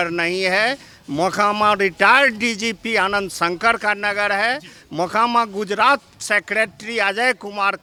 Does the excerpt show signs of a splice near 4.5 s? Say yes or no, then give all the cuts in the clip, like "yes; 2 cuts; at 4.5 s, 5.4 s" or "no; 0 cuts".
no; 0 cuts